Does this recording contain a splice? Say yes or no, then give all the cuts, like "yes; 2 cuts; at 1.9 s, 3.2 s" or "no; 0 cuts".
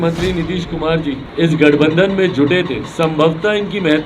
yes; 2 cuts; at 1.2 s, 2.8 s